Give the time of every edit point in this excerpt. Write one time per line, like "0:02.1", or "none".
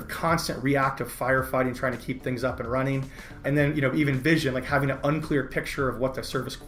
none